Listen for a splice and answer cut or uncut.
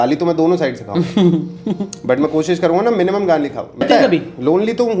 cut